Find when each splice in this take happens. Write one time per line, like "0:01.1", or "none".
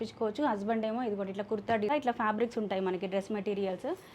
0:01.9